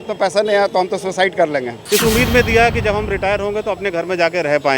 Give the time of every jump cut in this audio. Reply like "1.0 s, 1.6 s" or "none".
1.8 s